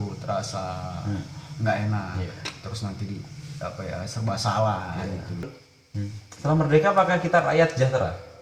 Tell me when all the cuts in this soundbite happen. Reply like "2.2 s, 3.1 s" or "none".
5.5 s